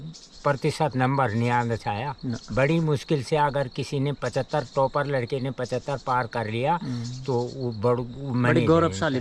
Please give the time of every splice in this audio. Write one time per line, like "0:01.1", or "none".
none

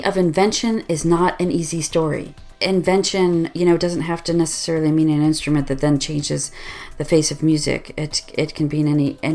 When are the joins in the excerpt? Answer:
0:02.5

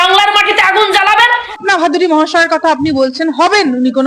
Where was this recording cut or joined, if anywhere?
0:01.6

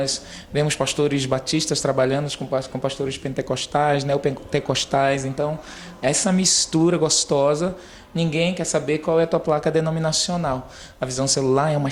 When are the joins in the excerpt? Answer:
none

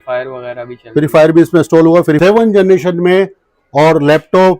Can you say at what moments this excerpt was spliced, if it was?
0:02.2

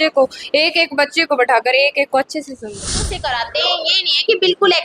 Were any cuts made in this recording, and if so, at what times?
0:02.7

